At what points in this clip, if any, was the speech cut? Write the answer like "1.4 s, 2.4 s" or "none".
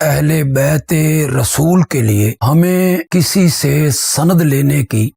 none